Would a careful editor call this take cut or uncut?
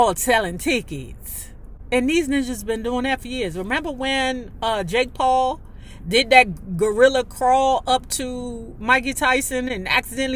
uncut